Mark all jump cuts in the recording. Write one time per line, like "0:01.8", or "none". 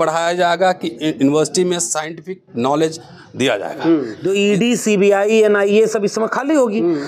0:04.1